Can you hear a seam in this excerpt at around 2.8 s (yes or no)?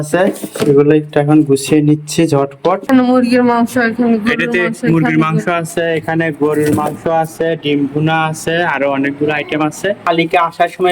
yes